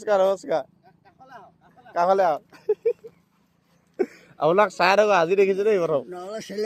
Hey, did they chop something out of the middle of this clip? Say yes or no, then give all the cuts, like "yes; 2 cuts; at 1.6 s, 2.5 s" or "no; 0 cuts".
no; 0 cuts